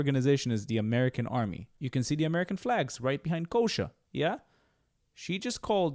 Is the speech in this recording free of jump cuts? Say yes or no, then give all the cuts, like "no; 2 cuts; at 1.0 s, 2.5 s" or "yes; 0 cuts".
no; 1 cut; at 1.8 s